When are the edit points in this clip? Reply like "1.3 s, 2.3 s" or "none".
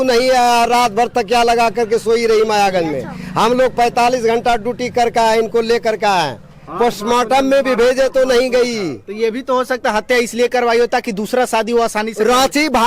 none